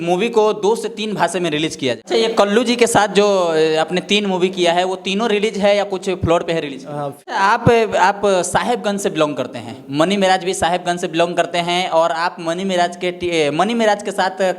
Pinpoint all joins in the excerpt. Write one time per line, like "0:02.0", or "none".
0:02.1
0:07.3